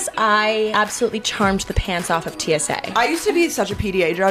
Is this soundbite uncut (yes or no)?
no